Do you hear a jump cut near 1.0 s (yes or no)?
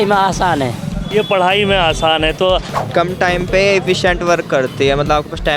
no